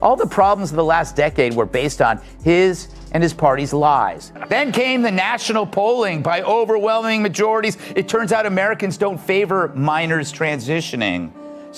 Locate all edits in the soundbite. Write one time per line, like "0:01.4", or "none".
0:04.3